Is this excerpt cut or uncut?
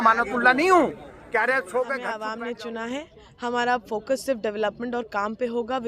cut